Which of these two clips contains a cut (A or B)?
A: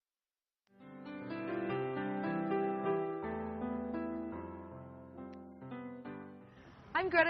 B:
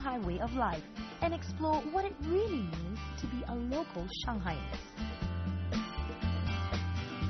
A